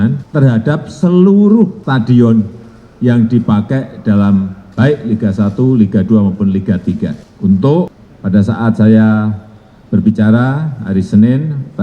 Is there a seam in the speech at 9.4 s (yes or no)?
no